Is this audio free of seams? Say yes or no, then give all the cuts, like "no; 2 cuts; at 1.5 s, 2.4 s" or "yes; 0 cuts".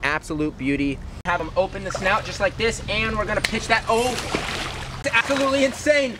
no; 2 cuts; at 1.4 s, 5.2 s